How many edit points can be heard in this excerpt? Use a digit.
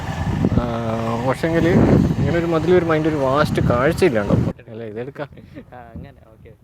1